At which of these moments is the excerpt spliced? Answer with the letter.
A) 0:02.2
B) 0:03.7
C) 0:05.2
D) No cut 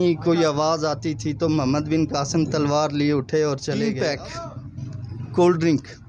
B